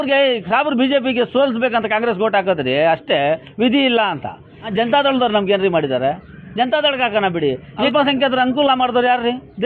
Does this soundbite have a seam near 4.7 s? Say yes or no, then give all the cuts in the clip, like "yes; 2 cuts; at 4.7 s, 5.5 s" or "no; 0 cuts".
yes; 2 cuts; at 4.7 s, 7.9 s